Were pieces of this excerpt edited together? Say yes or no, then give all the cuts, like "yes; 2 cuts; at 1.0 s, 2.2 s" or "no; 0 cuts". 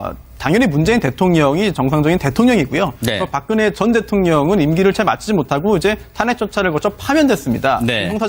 yes; 1 cut; at 6.6 s